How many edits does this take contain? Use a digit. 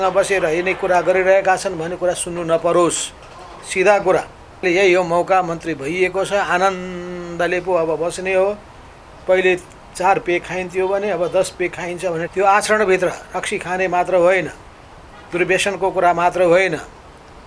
2